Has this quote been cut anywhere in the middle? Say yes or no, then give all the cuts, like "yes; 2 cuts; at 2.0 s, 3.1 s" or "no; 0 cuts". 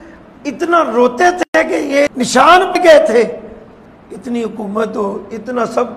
yes; 1 cut; at 2.1 s